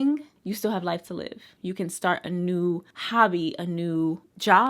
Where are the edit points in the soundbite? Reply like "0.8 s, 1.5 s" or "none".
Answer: 1.5 s